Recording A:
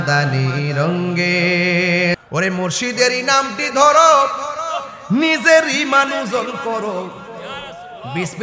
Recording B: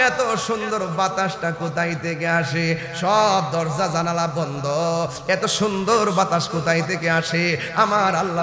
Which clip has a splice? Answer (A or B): A